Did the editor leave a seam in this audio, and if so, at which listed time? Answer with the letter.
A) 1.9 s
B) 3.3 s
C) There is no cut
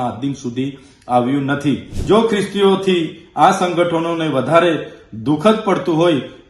A